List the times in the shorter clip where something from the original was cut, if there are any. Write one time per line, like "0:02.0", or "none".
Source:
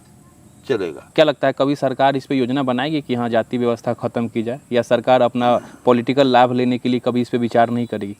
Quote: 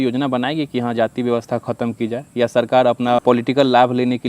0:03.2